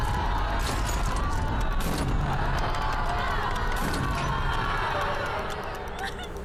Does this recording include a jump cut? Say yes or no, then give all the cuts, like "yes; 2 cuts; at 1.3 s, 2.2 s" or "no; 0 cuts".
no; 0 cuts